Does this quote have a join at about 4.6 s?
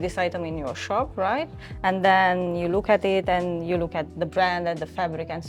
no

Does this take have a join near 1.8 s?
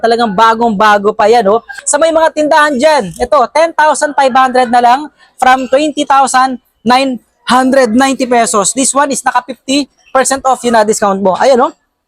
yes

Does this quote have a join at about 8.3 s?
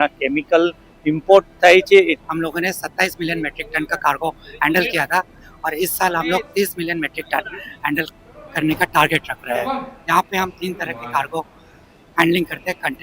no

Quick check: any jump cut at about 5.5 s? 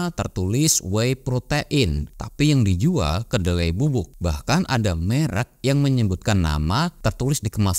no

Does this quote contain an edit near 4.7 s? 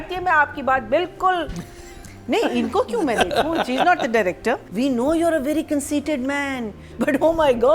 yes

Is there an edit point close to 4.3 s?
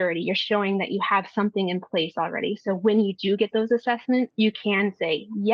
yes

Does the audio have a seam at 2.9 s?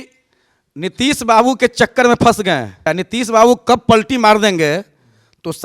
yes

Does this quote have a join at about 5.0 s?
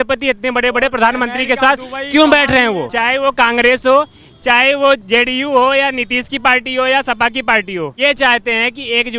yes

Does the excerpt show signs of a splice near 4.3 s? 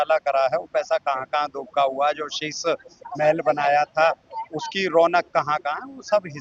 no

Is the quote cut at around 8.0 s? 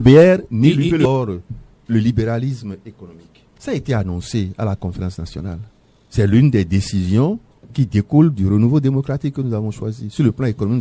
no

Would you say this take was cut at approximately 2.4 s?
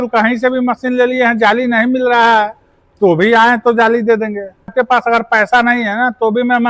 no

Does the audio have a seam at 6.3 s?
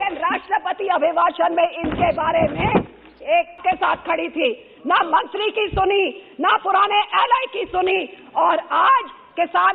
no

